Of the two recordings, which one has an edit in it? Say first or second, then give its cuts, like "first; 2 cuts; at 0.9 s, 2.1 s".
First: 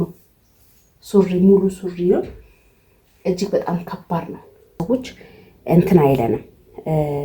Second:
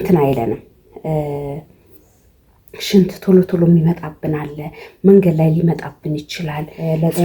first; 1 cut; at 4.8 s